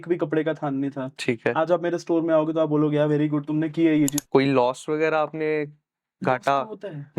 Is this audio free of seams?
no; 1 cut; at 4.1 s

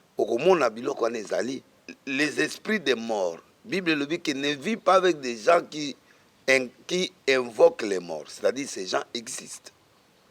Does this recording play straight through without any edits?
no; 1 cut; at 1.7 s

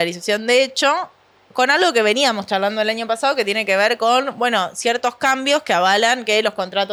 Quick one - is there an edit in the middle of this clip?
no; 0 cuts

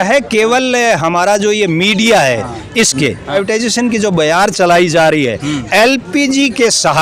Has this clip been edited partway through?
yes; 1 cut; at 3.3 s

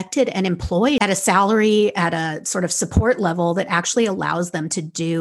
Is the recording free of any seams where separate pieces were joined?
no; 1 cut; at 1.0 s

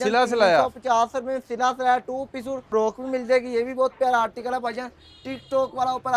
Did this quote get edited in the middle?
yes; 1 cut; at 2.7 s

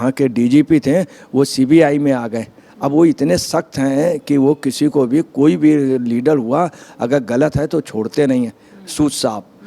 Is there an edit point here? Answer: no; 0 cuts

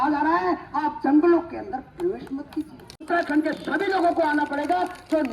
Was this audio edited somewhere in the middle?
yes; 1 cut; at 3.1 s

